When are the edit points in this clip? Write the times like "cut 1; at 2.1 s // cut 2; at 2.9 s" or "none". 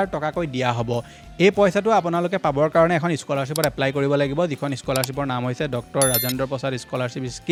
none